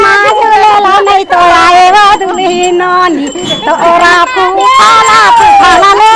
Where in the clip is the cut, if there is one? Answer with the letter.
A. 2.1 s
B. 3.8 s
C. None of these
C